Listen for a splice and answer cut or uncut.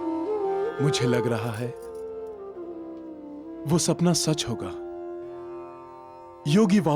uncut